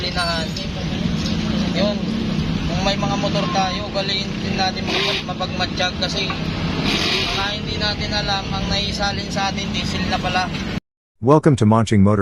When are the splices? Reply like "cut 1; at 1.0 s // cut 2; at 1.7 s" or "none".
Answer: cut 1; at 10.9 s